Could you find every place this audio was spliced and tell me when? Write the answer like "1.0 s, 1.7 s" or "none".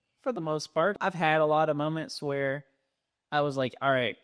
0.9 s